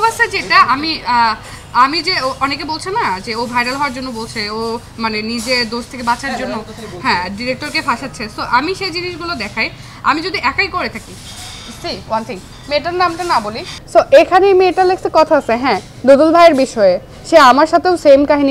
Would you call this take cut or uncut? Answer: uncut